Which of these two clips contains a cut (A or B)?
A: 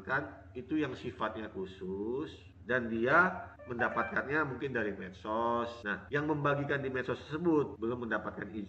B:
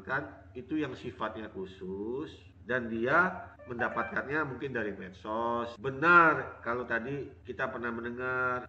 B